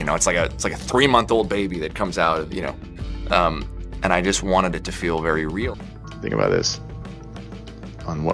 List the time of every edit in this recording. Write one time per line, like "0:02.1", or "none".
0:05.8